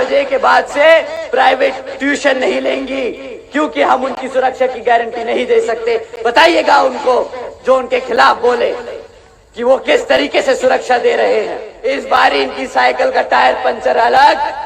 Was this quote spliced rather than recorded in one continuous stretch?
yes; 1 cut; at 11.7 s

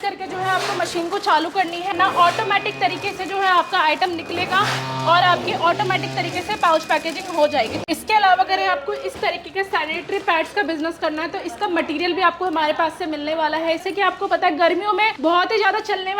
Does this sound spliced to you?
yes; 4 cuts; at 1.9 s, 7.8 s, 13.8 s, 15.1 s

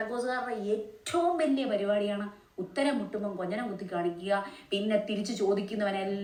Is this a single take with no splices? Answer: yes; 0 cuts

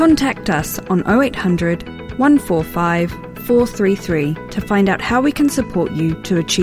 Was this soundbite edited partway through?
no; 0 cuts

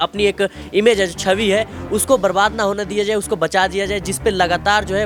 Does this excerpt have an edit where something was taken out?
no; 0 cuts

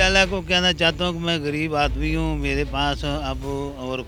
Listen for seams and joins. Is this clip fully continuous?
yes; 0 cuts

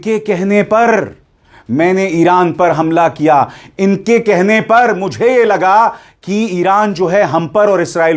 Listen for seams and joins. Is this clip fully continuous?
yes; 0 cuts

